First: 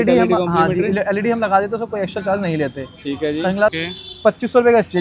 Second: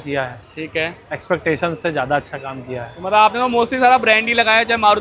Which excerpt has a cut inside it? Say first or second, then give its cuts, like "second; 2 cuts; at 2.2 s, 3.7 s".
first; 1 cut; at 3.8 s